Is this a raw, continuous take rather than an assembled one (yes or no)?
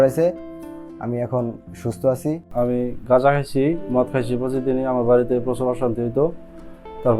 no